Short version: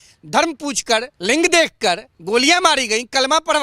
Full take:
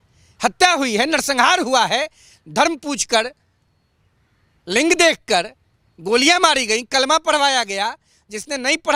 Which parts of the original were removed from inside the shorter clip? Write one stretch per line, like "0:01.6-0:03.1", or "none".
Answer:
0:03.4-0:04.6
0:05.6-0:05.9